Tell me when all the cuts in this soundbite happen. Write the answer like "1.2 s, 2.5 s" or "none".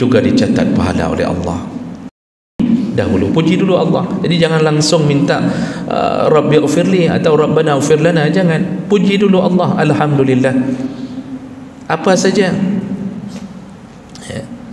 2.6 s